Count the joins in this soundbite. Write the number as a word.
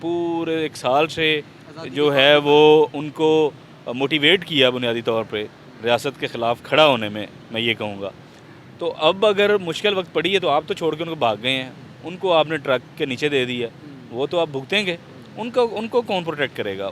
zero